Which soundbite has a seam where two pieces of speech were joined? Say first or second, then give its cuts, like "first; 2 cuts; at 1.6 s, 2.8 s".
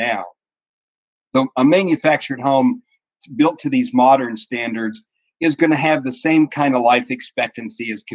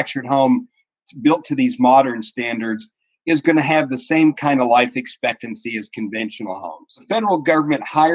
second; 1 cut; at 7.0 s